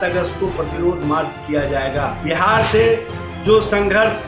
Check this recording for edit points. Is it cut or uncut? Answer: cut